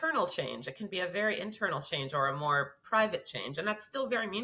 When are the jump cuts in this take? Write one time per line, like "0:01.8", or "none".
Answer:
none